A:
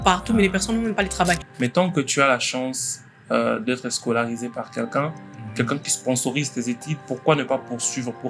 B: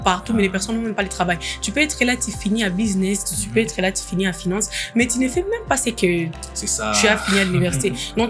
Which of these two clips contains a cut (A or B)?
A